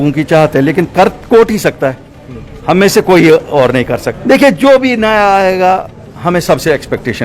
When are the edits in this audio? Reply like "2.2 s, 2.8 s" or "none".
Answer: 4.1 s